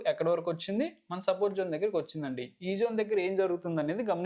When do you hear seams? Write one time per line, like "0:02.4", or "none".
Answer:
none